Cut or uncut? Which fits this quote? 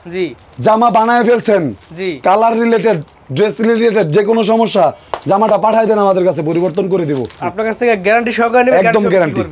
uncut